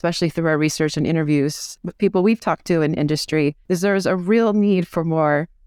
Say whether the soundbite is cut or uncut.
cut